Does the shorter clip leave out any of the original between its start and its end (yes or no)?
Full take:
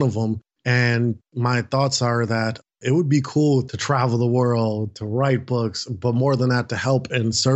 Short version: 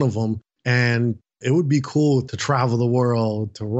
yes